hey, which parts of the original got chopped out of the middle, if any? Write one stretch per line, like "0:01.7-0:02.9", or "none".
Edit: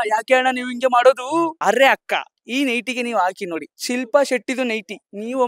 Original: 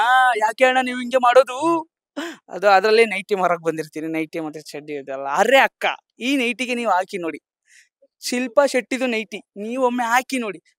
0:01.9-0:05.3
0:07.4-0:08.1